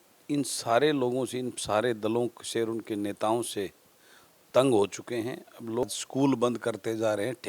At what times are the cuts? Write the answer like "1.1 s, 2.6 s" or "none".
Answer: 5.8 s